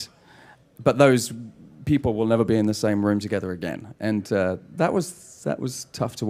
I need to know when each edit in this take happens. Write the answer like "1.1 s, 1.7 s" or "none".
1.8 s